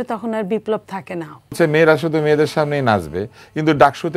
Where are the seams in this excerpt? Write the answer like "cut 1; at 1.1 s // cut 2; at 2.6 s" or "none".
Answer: cut 1; at 1.5 s

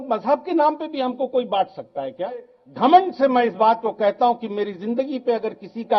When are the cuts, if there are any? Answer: cut 1; at 2.6 s

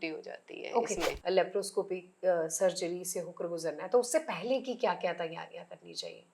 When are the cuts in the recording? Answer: cut 1; at 1.1 s

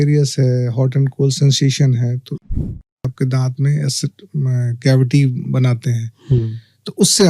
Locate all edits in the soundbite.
cut 1; at 2.8 s

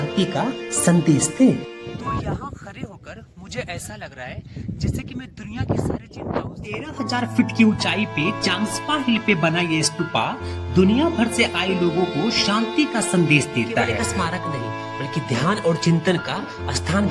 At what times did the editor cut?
cut 1; at 2.2 s // cut 2; at 6.9 s // cut 3; at 14.1 s

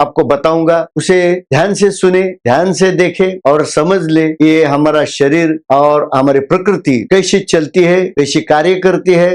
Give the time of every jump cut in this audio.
none

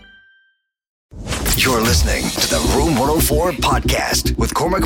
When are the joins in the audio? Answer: cut 1; at 1.0 s

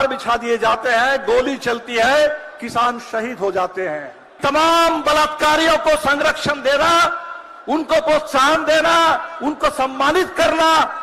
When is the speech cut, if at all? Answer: cut 1; at 4.4 s

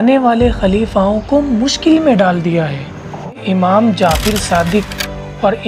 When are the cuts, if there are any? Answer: cut 1; at 3.4 s

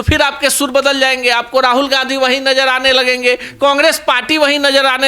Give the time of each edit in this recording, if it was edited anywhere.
none

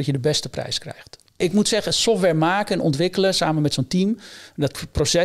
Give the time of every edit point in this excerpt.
cut 1; at 1.4 s

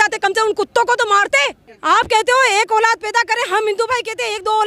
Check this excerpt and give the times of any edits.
cut 1; at 1.7 s

